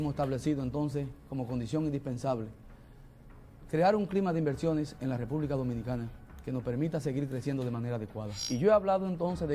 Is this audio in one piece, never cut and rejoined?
no; 1 cut; at 8.3 s

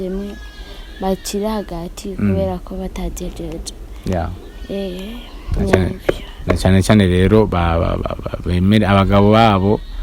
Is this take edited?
no; 0 cuts

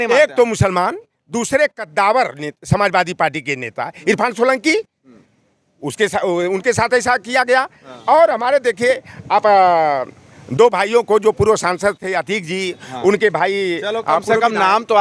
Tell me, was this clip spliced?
no; 0 cuts

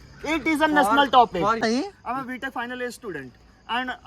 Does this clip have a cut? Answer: yes; 1 cut; at 1.6 s

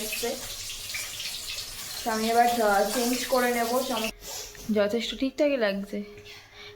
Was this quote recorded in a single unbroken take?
no; 1 cut; at 4.1 s

